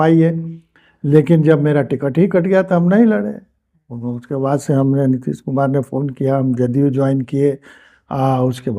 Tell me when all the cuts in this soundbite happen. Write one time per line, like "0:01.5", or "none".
none